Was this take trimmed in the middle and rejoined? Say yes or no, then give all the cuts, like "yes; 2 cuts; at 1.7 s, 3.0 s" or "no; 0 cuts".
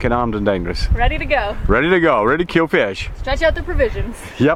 no; 0 cuts